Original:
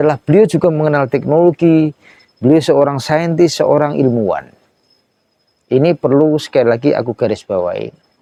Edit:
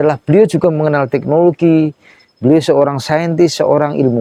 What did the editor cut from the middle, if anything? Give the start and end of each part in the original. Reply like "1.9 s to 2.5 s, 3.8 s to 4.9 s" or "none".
none